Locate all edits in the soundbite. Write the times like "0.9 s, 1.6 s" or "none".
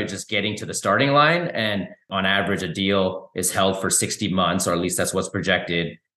2.0 s